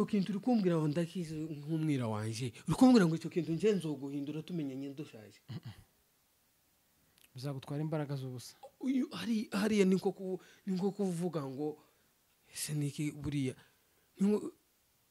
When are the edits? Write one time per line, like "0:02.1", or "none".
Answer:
none